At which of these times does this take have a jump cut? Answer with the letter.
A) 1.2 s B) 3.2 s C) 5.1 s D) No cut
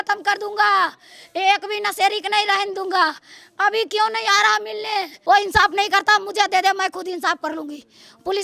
C